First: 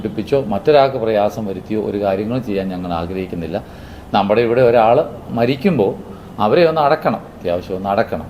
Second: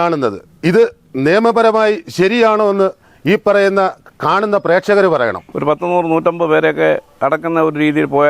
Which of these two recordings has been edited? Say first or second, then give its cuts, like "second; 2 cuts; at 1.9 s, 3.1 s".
second; 1 cut; at 5.5 s